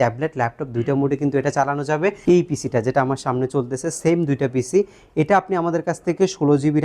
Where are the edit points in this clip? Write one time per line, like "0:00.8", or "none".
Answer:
0:02.2